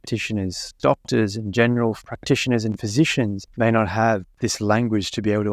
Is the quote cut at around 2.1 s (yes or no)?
yes